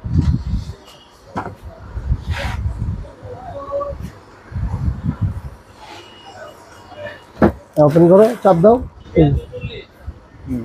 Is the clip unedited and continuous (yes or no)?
no